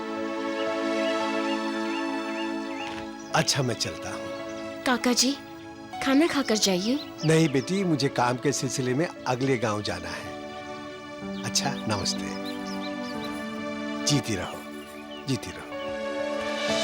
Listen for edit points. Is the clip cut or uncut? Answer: uncut